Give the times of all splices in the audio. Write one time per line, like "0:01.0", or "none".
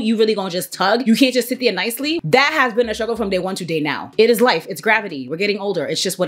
0:02.2
0:04.1